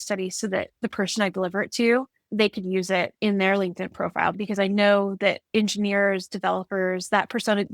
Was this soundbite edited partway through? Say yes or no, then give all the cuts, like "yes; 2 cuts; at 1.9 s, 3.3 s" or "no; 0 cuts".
yes; 4 cuts; at 2.2 s, 3.1 s, 3.9 s, 5.4 s